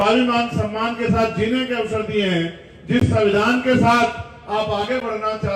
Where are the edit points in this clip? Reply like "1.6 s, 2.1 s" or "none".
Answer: none

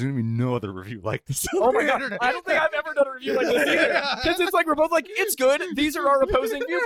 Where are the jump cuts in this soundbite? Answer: none

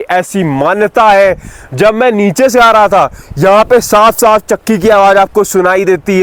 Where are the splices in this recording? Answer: none

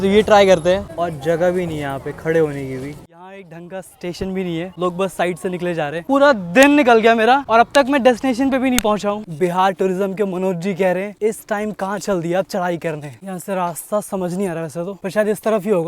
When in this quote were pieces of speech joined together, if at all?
0.9 s, 3.1 s, 6.0 s, 9.2 s, 13.1 s

